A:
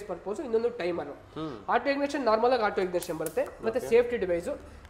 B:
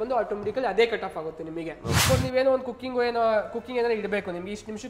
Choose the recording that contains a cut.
B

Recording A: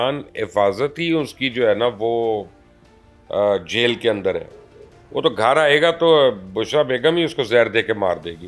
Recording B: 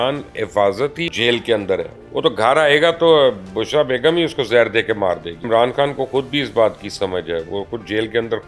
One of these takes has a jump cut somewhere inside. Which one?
B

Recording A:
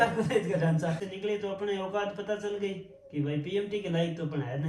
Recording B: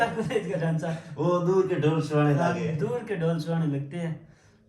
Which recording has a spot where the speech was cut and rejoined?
A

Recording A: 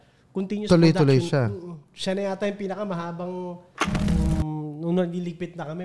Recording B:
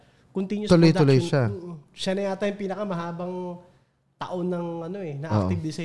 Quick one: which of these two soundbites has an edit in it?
A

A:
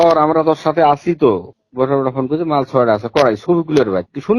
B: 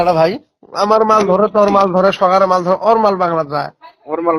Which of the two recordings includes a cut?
A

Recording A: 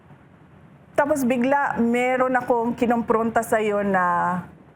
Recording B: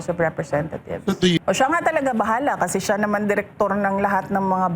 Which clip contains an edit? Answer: B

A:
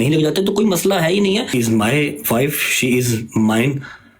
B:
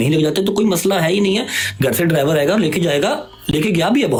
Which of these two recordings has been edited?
A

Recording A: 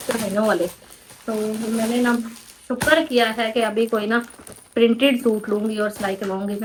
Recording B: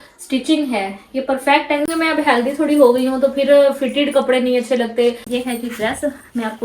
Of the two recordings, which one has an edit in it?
B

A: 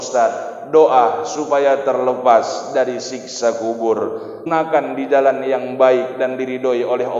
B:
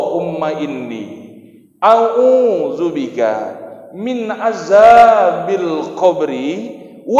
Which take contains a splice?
A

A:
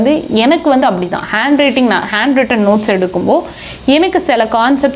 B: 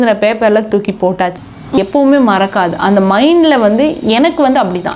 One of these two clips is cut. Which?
B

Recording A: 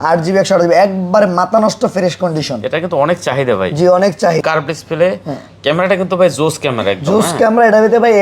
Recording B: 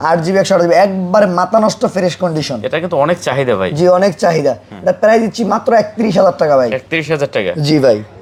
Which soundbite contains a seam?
A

